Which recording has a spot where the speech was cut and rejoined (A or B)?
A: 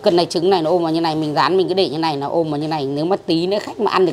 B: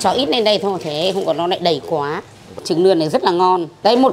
B